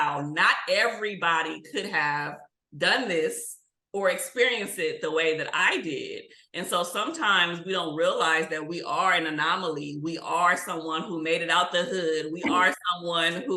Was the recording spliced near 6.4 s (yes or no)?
no